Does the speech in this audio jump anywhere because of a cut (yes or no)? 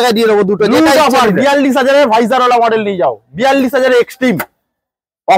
no